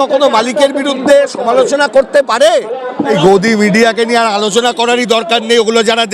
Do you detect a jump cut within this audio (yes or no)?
yes